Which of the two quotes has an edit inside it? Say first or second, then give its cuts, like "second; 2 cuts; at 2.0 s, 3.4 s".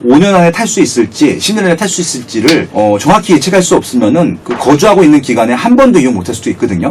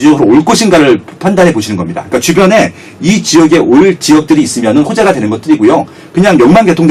first; 2 cuts; at 2.7 s, 4.5 s